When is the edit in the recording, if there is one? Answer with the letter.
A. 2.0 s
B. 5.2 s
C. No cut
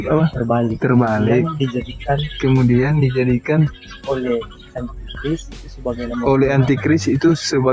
C